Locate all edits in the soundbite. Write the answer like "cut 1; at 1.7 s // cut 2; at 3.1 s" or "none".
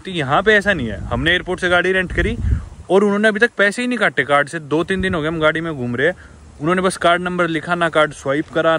none